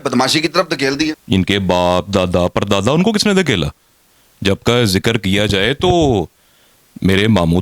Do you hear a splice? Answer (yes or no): yes